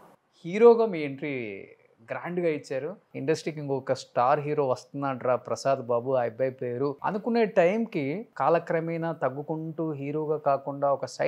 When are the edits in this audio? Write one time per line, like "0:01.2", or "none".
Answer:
0:03.1
0:07.0
0:08.3